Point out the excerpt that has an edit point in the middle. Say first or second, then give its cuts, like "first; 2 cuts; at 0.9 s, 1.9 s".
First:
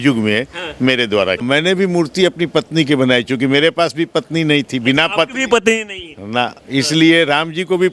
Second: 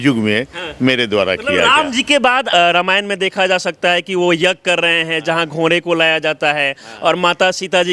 first; 1 cut; at 1.4 s